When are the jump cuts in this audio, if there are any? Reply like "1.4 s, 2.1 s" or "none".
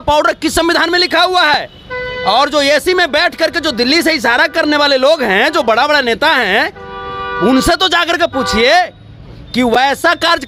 none